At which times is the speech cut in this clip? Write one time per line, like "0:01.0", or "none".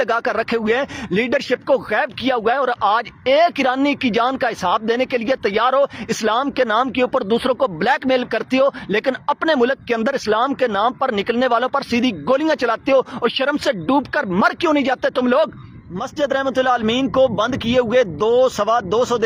0:16.0